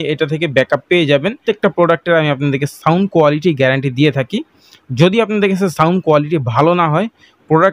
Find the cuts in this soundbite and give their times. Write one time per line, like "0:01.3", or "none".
0:01.4

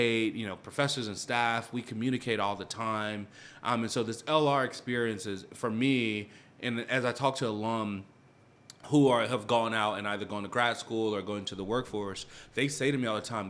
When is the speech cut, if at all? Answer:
none

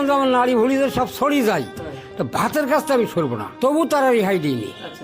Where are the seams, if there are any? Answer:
0:03.4

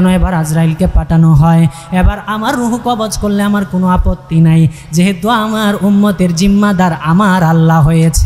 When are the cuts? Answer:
none

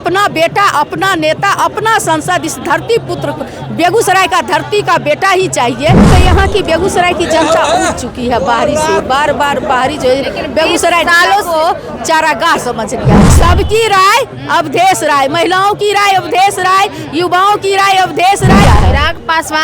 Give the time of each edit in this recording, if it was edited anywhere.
0:06.1
0:13.3
0:18.6

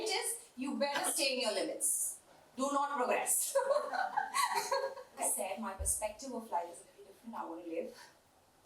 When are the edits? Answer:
0:05.2

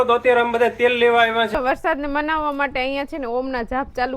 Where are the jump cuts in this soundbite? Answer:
0:01.5

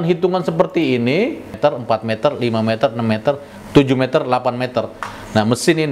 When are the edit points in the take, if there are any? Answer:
0:01.5

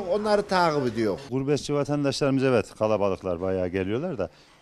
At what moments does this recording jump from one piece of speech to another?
0:01.3

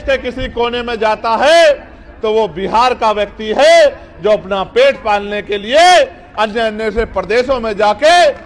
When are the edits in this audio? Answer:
none

